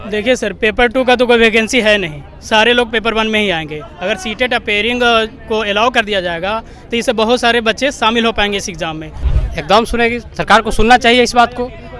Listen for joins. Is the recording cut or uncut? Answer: cut